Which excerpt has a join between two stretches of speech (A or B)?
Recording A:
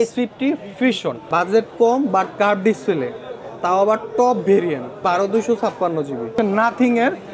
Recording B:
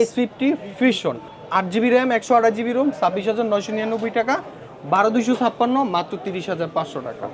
A